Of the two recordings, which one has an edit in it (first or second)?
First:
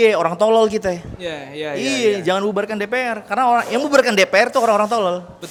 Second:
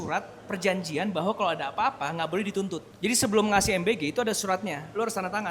second